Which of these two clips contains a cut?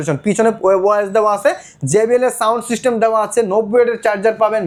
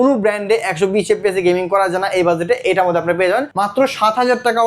second; 1 cut; at 3.5 s

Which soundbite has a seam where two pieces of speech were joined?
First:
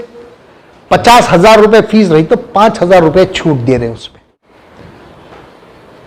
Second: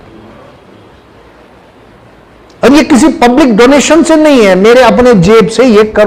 first; 1 cut; at 4.2 s

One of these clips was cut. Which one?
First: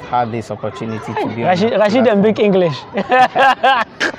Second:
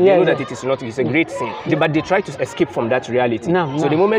second; 1 cut; at 1.5 s

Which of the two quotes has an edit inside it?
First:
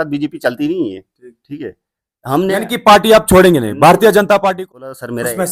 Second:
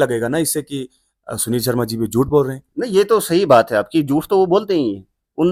first; 1 cut; at 4.6 s

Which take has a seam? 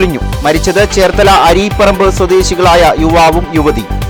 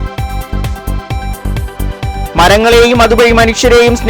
second; 1 cut; at 1.1 s

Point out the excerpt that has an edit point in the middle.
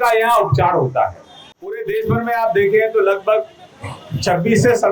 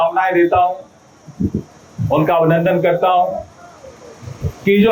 first; 1 cut; at 1.8 s

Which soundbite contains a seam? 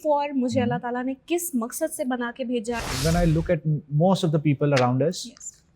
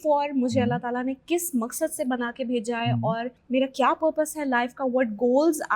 first; 1 cut; at 2.8 s

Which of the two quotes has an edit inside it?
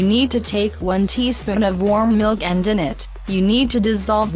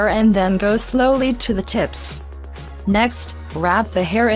first; 1 cut; at 2.2 s

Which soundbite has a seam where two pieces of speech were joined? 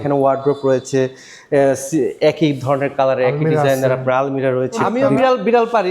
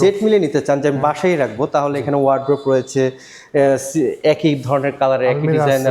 first; 1 cut; at 4.8 s

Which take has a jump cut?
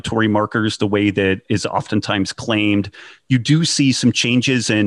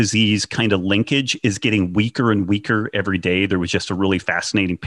first; 1 cut; at 1.4 s

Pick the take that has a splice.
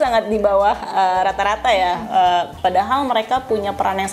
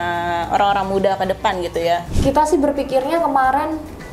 second; 1 cut; at 2.1 s

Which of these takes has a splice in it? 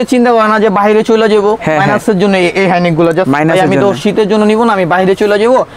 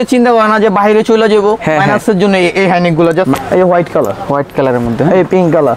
second; 1 cut; at 3.4 s

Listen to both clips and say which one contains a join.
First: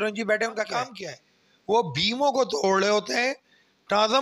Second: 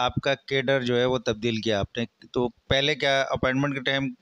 first; 1 cut; at 1.7 s

